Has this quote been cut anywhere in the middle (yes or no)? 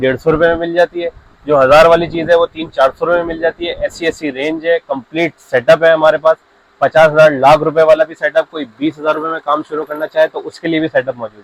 no